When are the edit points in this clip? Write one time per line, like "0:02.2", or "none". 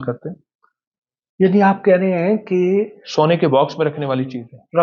none